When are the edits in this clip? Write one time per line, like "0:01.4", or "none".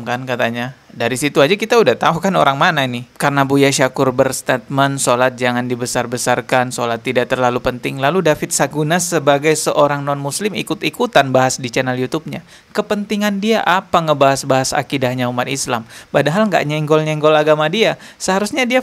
0:03.0